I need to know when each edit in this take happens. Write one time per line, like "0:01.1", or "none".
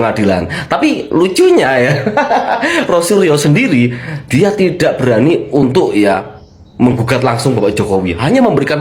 none